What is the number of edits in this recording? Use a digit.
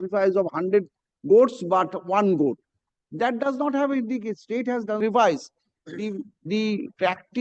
1